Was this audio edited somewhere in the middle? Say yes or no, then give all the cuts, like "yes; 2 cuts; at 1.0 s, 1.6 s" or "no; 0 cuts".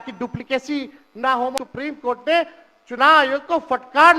yes; 1 cut; at 1.6 s